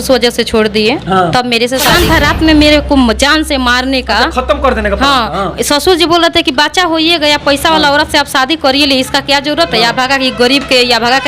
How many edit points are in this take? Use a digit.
1